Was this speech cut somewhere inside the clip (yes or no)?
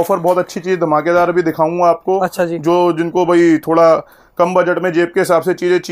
no